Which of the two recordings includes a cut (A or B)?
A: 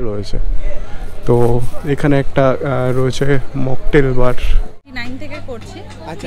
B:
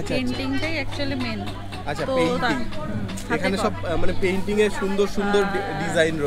A